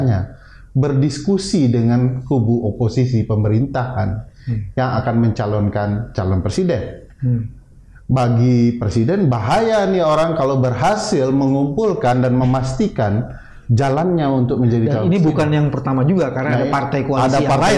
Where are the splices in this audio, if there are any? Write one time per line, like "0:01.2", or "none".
none